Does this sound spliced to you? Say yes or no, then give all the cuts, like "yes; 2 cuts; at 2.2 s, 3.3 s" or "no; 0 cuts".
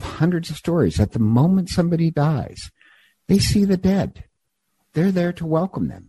no; 0 cuts